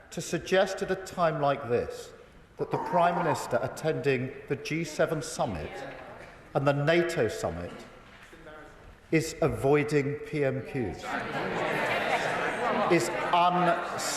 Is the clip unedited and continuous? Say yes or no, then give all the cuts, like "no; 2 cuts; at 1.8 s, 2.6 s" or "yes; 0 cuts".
yes; 0 cuts